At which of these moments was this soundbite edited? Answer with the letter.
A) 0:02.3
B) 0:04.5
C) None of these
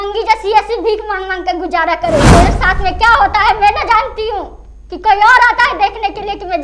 A